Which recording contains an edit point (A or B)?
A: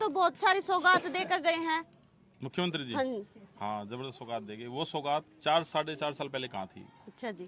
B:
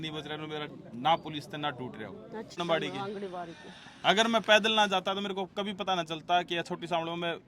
B